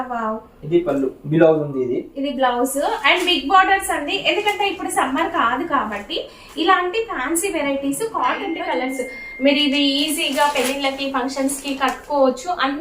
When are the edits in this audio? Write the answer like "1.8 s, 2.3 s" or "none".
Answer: 8.7 s